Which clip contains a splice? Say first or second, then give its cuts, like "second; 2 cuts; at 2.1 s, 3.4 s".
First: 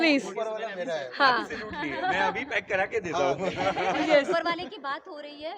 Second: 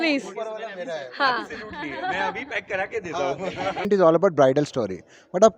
second; 1 cut; at 3.9 s